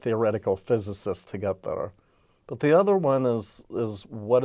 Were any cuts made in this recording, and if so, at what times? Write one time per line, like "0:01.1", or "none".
none